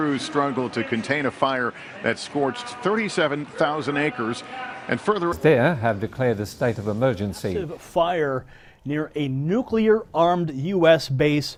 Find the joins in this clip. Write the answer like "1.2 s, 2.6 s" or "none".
none